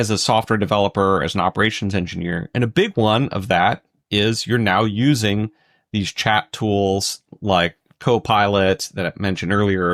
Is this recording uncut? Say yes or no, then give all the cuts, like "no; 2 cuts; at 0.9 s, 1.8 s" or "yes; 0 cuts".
yes; 0 cuts